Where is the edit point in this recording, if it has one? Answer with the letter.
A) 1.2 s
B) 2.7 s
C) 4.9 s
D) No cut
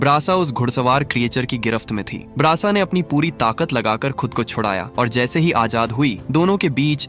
D